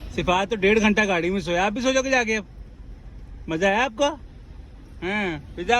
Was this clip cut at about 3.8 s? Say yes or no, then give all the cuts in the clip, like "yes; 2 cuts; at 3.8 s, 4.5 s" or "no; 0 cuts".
no; 0 cuts